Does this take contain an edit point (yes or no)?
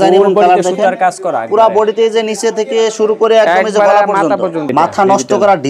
yes